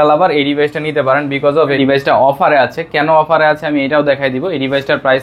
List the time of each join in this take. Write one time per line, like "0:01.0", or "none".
0:01.8